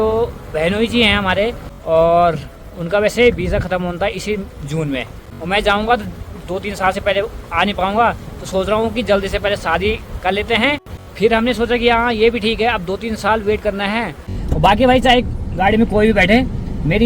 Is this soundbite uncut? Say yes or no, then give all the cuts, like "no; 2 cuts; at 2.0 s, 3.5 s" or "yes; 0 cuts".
no; 4 cuts; at 1.7 s, 5.3 s, 11.0 s, 14.3 s